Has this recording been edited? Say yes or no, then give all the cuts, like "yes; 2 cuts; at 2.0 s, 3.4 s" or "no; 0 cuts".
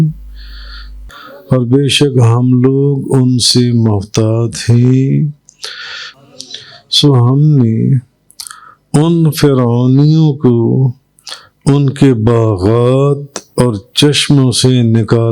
yes; 2 cuts; at 0.9 s, 6.0 s